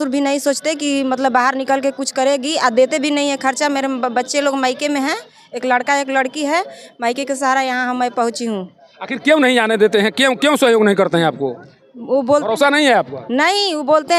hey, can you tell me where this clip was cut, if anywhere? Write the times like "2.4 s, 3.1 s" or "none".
none